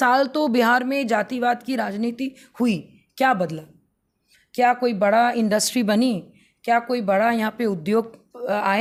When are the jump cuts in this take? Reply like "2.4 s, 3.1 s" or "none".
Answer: none